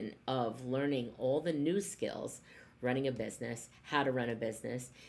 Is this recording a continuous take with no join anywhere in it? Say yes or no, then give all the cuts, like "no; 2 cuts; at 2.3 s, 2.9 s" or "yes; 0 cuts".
yes; 0 cuts